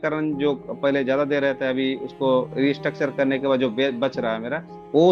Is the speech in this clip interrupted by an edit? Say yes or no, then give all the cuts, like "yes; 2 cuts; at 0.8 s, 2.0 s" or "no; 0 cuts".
no; 0 cuts